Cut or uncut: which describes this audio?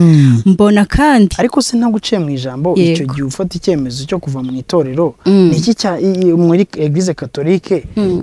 cut